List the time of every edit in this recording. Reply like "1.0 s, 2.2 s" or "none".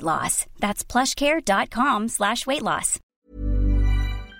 3.0 s